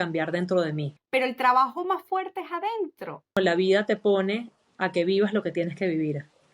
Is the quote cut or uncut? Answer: cut